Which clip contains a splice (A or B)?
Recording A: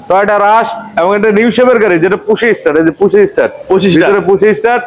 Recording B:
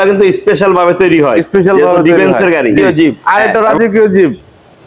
B